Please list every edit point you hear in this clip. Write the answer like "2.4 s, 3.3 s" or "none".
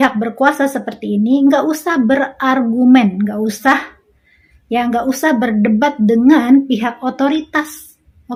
none